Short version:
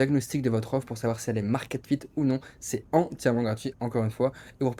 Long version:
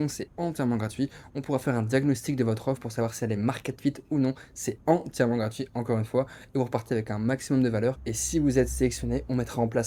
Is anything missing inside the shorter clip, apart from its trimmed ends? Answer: no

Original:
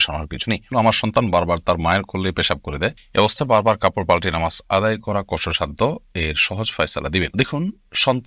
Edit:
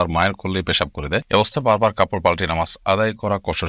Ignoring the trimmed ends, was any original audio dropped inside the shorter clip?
yes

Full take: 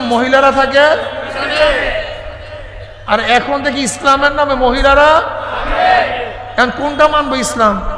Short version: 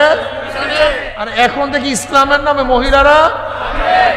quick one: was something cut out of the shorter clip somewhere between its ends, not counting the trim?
yes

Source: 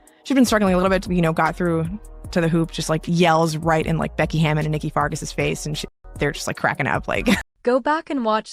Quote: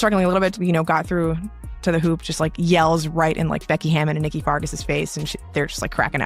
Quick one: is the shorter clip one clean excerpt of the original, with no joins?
no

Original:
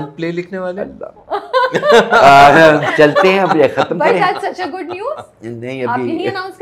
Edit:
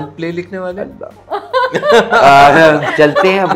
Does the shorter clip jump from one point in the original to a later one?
no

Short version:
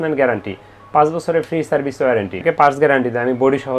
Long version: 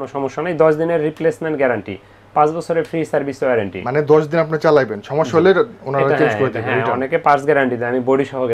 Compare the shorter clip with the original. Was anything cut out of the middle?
yes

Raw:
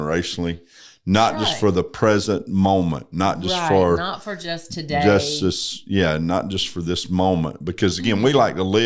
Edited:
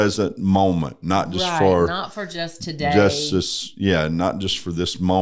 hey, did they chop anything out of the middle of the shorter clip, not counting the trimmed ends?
no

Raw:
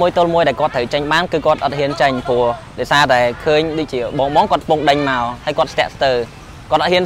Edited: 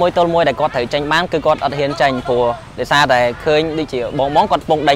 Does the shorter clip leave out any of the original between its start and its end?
no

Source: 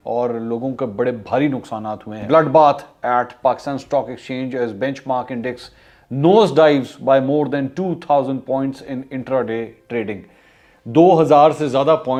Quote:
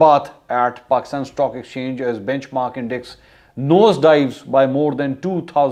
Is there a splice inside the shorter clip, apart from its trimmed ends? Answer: no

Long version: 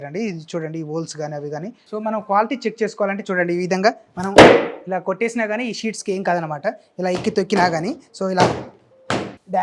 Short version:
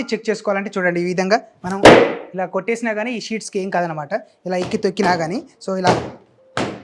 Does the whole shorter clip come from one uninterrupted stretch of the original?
yes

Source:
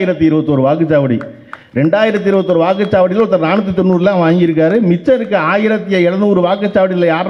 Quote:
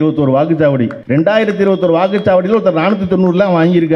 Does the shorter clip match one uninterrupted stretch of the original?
no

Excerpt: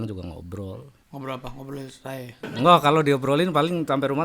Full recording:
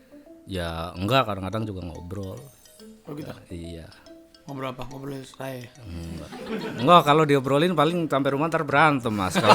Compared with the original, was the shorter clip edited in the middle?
yes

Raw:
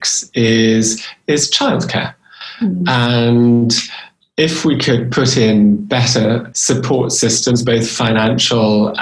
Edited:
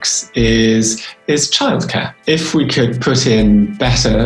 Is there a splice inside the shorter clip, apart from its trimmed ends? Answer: yes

